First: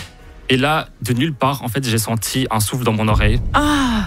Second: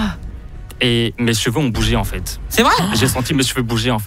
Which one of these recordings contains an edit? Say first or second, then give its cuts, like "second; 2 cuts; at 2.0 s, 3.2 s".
second; 1 cut; at 2.9 s